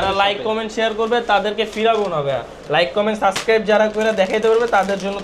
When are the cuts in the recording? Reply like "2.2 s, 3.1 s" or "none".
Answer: none